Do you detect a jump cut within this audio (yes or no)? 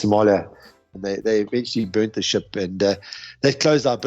yes